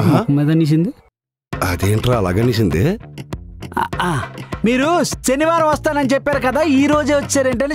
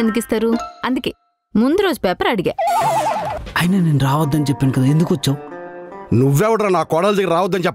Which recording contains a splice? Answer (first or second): second